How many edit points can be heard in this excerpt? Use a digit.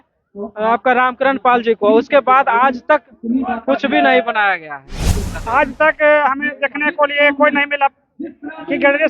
1